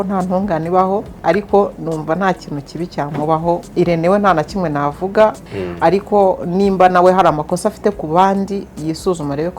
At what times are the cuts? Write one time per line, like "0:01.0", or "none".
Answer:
0:01.2
0:03.7
0:05.4